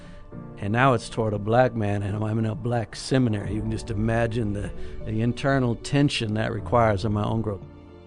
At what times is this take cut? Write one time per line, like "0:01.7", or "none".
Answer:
none